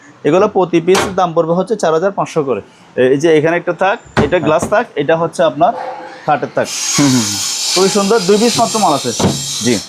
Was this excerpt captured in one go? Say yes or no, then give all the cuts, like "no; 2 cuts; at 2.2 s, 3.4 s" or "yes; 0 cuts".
no; 1 cut; at 2.8 s